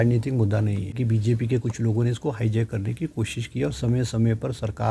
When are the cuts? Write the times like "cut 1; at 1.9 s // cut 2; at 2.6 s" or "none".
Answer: cut 1; at 1.0 s